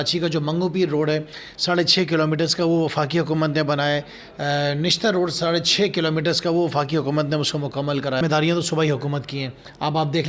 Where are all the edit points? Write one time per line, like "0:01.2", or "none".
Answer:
0:08.2